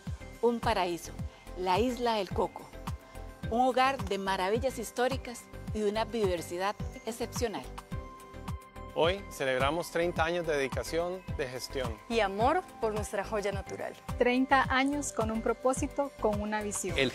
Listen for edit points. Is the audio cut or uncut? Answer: uncut